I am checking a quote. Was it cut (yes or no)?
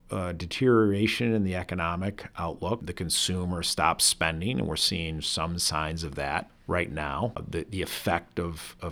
yes